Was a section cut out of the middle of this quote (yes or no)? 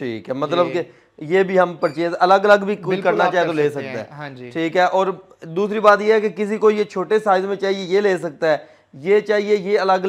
no